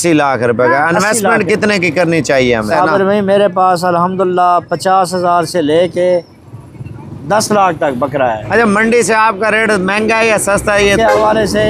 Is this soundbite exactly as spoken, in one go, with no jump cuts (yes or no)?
no